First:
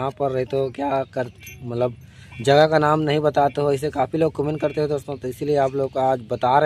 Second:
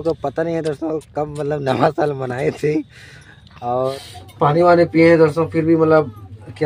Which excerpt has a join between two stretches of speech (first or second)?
second